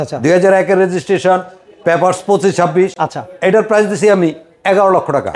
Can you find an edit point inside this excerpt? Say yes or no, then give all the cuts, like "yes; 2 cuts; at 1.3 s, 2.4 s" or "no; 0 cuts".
no; 0 cuts